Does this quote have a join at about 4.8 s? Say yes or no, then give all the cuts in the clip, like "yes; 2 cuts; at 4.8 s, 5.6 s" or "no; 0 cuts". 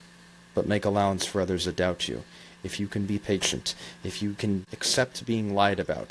yes; 1 cut; at 4.8 s